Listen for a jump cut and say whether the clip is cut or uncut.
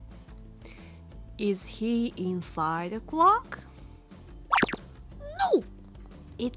cut